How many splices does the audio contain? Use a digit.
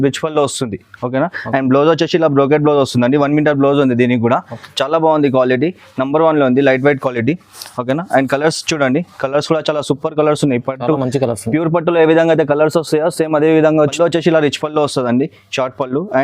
1